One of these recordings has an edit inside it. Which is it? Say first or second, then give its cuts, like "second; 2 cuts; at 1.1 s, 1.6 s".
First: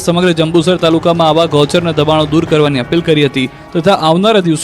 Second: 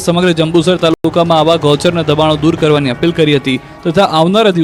first; 1 cut; at 1.0 s